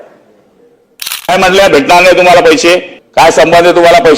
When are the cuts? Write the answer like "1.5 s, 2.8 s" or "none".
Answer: 1.3 s, 3.0 s